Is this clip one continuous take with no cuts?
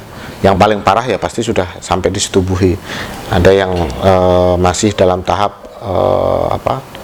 yes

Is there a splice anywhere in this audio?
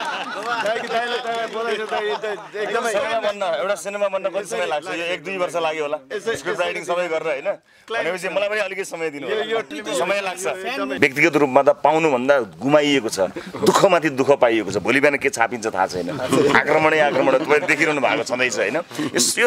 yes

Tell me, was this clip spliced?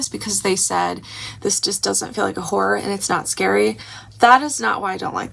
no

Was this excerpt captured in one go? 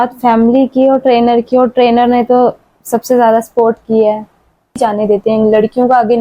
no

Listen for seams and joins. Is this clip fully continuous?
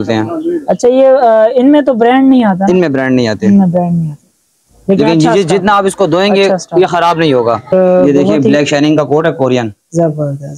no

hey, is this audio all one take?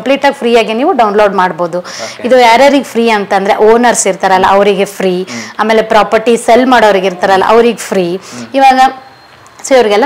yes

